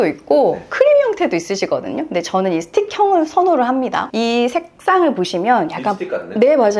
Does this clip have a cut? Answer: no; 0 cuts

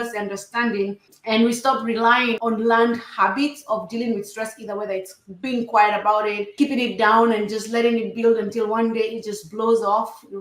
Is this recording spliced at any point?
yes; 1 cut; at 2.4 s

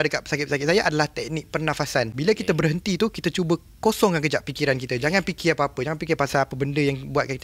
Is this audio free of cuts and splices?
no; 2 cuts; at 2.1 s, 6.3 s

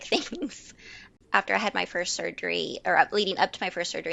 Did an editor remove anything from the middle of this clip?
no; 0 cuts

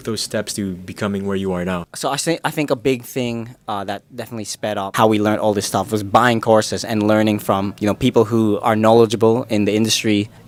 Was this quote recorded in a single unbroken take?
yes; 0 cuts

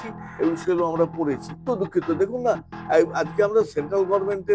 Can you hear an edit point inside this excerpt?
yes; 1 cut; at 1.6 s

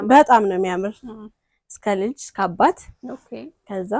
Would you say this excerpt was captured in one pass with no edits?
yes; 0 cuts

